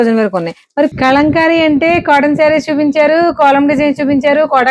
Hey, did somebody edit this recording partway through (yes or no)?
yes